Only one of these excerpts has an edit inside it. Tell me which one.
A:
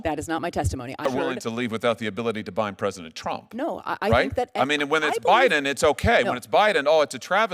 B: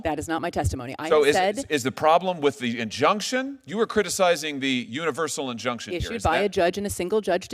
A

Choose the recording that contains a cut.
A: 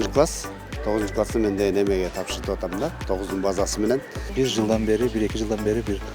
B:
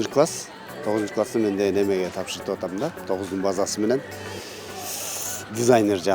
A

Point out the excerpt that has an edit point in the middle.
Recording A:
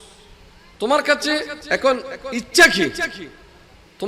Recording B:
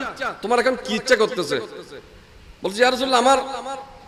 A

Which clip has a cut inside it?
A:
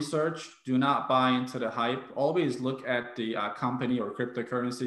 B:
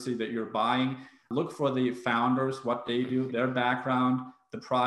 B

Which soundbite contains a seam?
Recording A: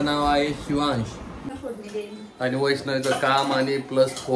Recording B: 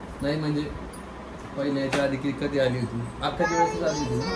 A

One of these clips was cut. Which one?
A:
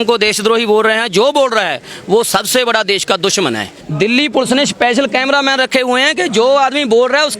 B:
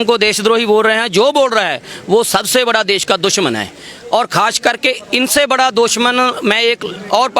A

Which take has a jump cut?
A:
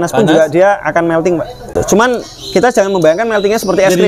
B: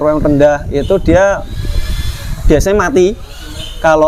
A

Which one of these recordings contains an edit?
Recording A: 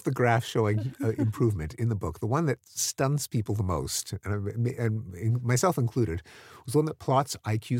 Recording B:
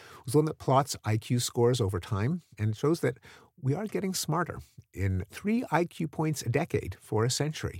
B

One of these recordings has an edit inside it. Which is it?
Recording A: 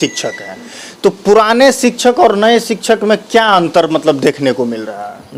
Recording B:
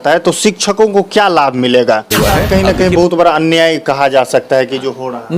B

